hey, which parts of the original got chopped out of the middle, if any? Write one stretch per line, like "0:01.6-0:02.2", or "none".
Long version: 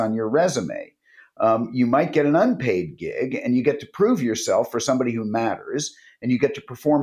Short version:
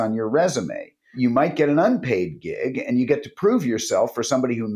0:01.1-0:01.7